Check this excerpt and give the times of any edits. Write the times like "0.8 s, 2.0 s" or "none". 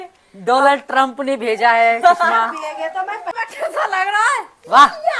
3.3 s

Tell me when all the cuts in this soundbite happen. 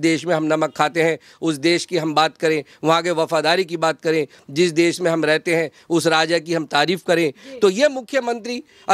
none

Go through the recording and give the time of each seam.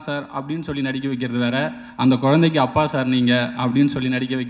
none

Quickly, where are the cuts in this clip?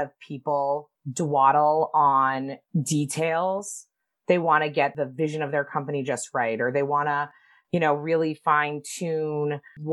1.0 s, 2.6 s, 4.9 s

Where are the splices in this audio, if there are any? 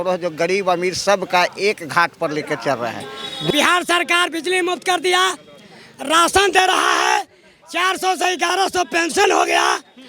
3.5 s

